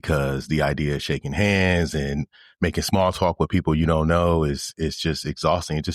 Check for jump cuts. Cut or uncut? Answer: uncut